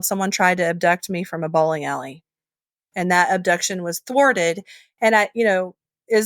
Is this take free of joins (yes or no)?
no